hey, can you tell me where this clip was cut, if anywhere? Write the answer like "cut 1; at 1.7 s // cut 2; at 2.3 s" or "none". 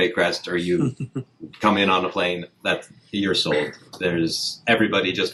none